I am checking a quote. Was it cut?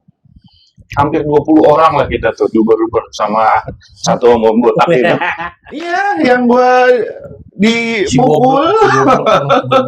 yes; 1 cut; at 6.0 s

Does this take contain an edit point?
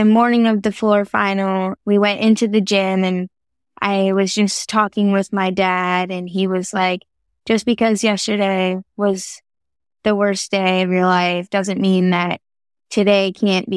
no; 0 cuts

